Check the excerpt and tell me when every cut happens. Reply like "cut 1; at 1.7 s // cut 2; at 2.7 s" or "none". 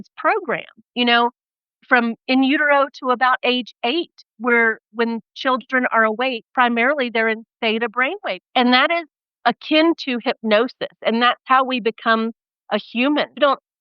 cut 1; at 6.4 s // cut 2; at 8.4 s